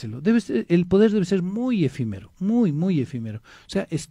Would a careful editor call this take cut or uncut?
uncut